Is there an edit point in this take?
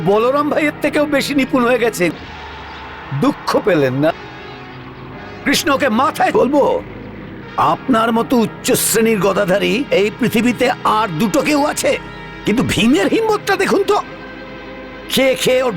yes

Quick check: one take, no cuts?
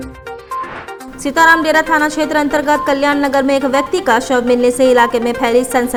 yes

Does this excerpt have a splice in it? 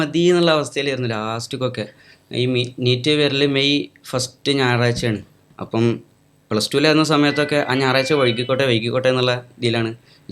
no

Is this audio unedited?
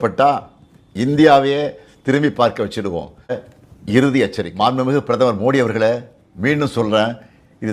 no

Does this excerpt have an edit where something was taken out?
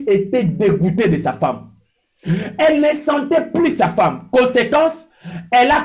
no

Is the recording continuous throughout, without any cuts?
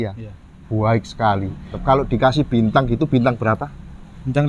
no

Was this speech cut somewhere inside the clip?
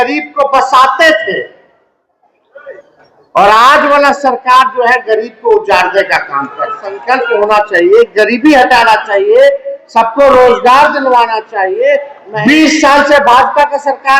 yes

